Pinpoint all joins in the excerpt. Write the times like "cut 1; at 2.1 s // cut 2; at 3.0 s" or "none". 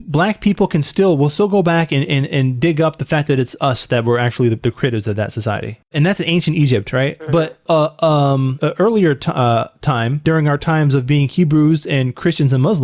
cut 1; at 5.8 s // cut 2; at 7.6 s // cut 3; at 8.5 s // cut 4; at 10.2 s